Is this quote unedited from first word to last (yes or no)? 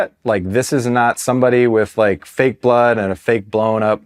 yes